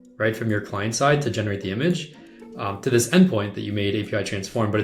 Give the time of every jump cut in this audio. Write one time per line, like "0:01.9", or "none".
none